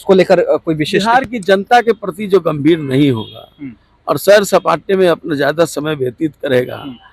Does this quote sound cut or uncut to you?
uncut